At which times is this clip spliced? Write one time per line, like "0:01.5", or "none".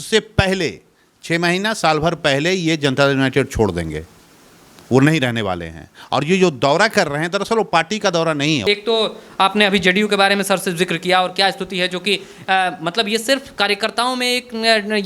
0:08.6